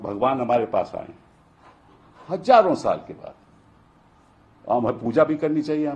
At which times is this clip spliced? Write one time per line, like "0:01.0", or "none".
none